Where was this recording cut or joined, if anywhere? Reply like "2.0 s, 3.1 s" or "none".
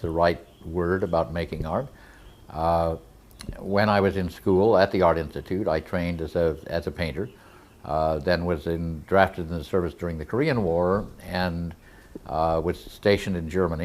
8.2 s